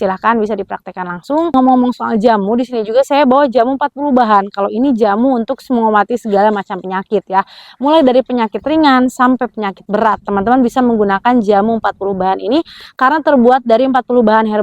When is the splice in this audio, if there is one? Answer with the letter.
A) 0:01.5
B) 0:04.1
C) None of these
A